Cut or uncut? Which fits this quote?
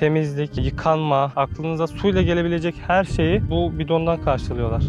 cut